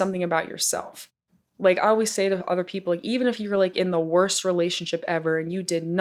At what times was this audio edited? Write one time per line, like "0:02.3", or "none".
none